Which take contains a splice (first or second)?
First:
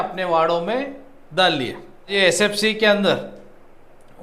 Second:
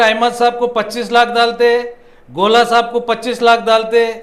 first